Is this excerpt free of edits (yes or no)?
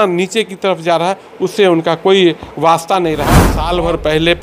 no